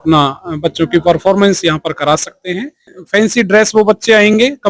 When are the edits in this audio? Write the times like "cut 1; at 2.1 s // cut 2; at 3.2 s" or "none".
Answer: cut 1; at 2.9 s